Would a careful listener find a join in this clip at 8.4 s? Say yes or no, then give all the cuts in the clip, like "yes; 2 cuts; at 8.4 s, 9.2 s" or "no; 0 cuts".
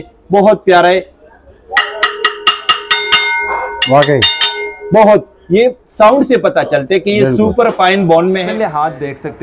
yes; 1 cut; at 8.4 s